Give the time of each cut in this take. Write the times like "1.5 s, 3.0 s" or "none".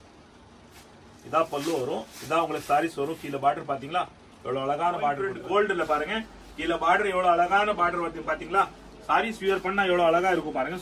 5.3 s